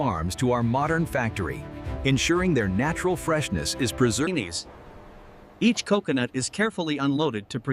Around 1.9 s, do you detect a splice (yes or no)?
no